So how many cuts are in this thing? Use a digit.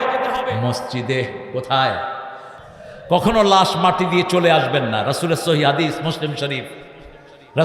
1